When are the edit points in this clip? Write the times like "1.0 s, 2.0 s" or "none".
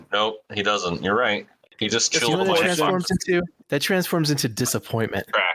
1.6 s